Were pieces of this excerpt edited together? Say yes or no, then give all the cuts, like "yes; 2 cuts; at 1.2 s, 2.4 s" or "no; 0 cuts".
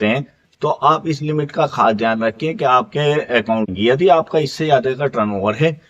yes; 1 cut; at 3.7 s